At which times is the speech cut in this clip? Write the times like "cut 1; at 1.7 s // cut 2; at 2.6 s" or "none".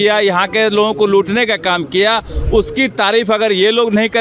none

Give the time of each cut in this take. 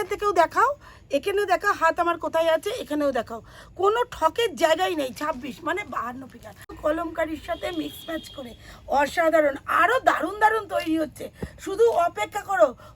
cut 1; at 6.7 s

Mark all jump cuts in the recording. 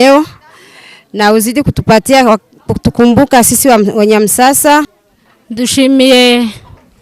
none

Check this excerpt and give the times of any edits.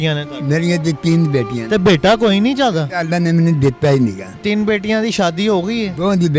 cut 1; at 4.3 s

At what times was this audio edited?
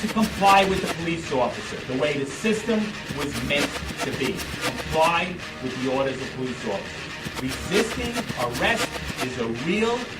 cut 1; at 2.2 s

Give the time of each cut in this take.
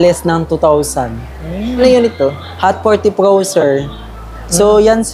cut 1; at 1.8 s

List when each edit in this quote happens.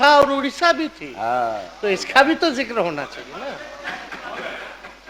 none

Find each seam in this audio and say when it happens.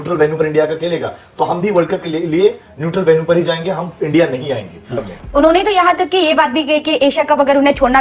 cut 1; at 5.0 s

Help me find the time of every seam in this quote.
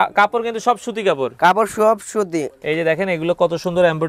cut 1; at 2.6 s

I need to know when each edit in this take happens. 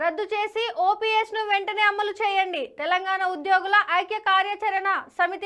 none

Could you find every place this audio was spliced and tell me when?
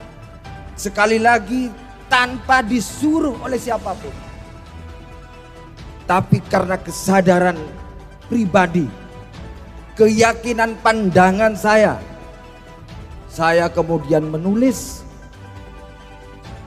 cut 1; at 4.1 s // cut 2; at 6.1 s

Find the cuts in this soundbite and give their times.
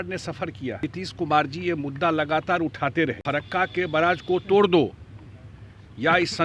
cut 1; at 0.9 s // cut 2; at 3.2 s

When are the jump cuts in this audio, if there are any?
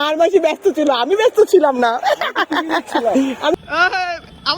cut 1; at 3.5 s

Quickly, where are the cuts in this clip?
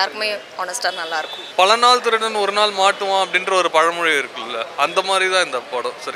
cut 1; at 1.4 s

